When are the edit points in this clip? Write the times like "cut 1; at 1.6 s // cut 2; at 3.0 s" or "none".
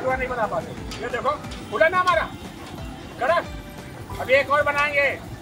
none

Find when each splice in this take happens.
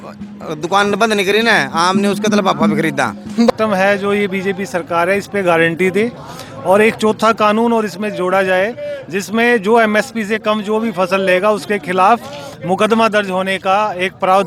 cut 1; at 3.5 s

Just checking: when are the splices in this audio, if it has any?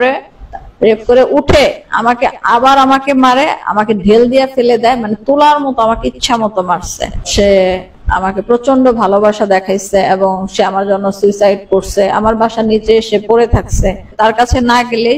cut 1; at 7.2 s // cut 2; at 14.1 s

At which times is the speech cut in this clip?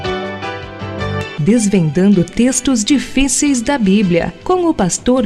none

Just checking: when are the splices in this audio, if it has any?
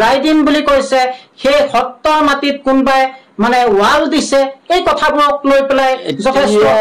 none

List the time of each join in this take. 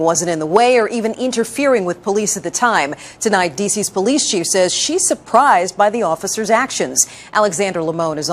cut 1; at 2.1 s

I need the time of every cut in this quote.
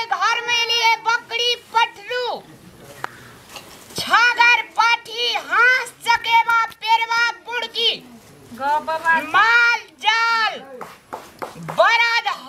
none

